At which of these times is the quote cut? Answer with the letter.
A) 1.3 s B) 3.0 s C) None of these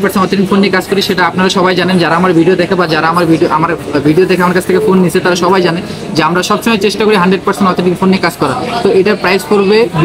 C